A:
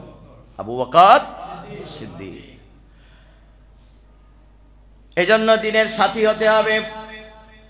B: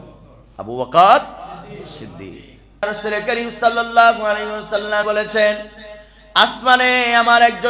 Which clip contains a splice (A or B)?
B